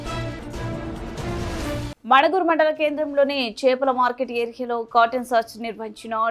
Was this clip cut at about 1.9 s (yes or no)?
yes